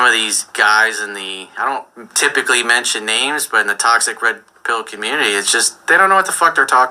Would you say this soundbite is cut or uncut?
uncut